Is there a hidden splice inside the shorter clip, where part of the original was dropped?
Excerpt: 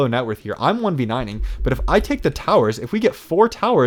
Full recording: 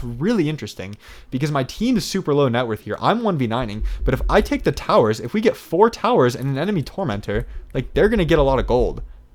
no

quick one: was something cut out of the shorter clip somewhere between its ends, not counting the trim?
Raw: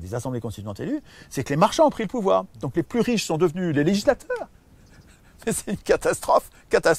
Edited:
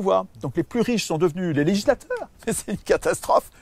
yes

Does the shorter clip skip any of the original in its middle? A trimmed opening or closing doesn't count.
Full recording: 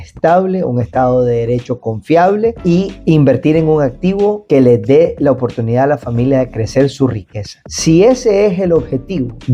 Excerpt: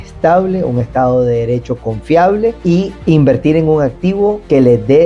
no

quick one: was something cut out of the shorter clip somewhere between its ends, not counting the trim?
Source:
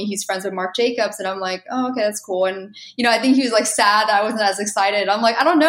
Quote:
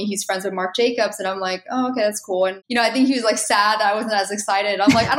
yes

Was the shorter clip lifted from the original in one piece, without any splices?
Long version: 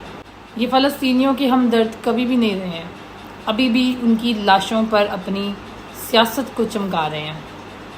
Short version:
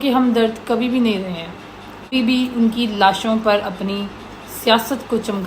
no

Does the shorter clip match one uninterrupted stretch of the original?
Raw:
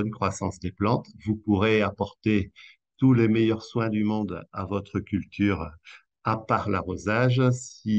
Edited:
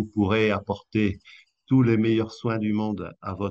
yes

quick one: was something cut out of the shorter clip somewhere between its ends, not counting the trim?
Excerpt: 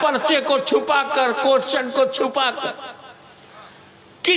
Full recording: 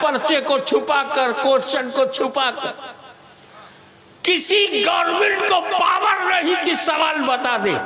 no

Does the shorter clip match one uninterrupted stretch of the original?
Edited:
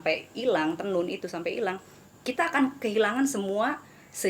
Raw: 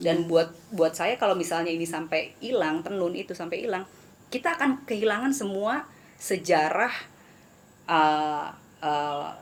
yes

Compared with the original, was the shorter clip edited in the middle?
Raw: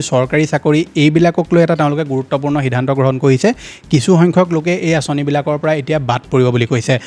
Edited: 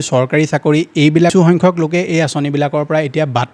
yes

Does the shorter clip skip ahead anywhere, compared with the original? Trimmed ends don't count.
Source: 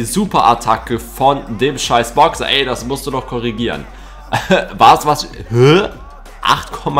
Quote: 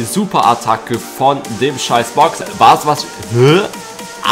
yes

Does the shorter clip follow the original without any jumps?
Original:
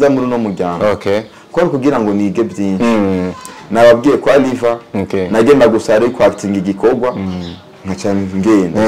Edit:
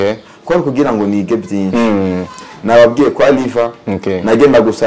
yes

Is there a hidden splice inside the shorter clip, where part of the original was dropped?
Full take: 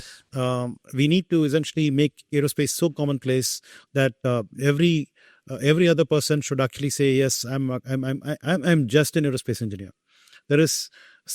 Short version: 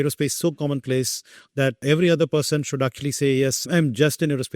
yes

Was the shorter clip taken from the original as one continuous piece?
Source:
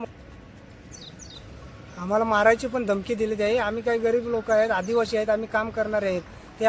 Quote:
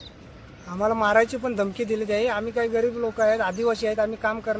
yes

